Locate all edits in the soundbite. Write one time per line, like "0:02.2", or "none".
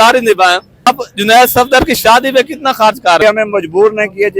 0:00.9
0:03.2